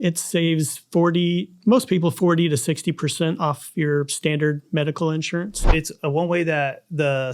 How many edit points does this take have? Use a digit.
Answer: 1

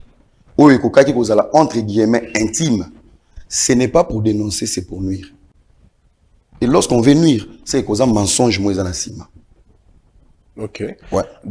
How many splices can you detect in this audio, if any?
0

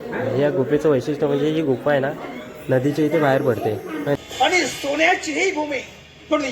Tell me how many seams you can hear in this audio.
1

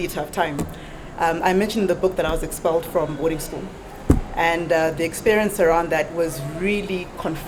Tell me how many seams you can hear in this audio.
0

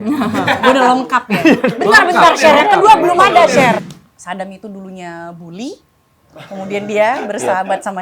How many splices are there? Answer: 1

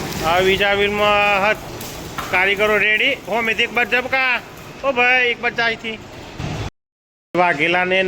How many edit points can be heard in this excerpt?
1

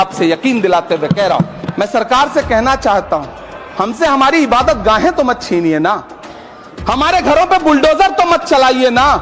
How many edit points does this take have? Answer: 1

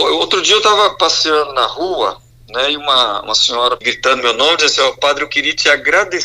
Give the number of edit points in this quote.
1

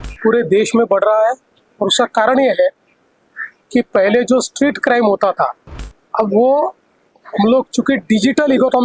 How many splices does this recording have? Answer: 0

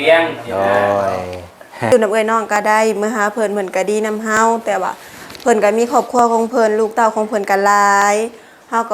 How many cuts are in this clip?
1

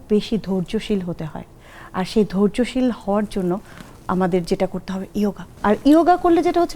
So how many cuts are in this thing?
1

